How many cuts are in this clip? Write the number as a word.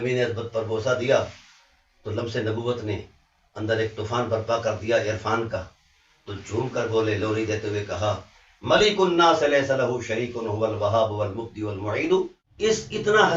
one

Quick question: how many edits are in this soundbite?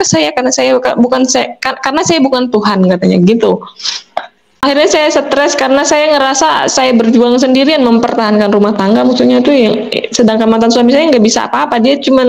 one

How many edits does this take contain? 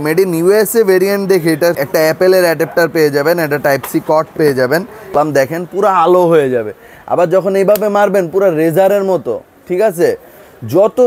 one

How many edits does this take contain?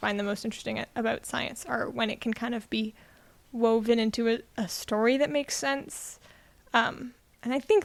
zero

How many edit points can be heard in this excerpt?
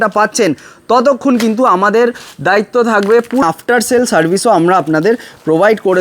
one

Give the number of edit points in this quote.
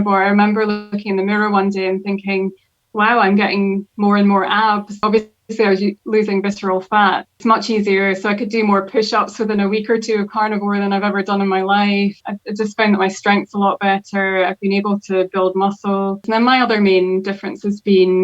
four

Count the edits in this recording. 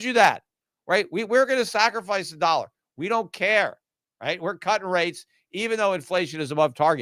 zero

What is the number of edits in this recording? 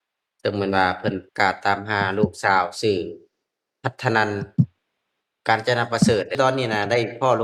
one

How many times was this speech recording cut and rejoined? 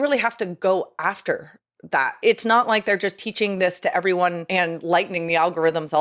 two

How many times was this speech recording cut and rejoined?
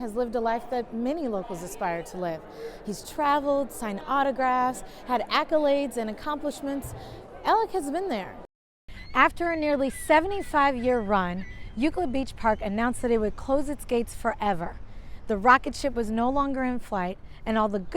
one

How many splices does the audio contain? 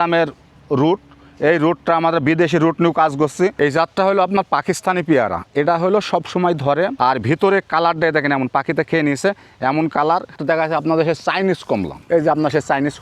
four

